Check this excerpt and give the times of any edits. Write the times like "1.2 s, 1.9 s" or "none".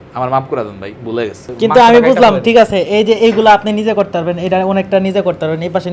1.5 s